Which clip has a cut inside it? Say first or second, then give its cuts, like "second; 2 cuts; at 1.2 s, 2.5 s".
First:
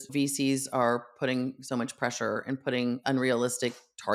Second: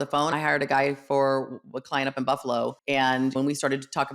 second; 1 cut; at 3.2 s